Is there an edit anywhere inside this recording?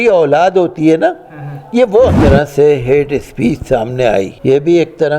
yes; 2 cuts; at 2.2 s, 4.3 s

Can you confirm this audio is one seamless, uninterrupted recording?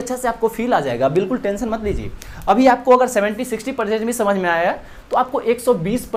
yes; 0 cuts

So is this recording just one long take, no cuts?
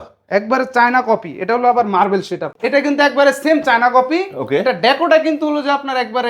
no; 1 cut; at 2.5 s

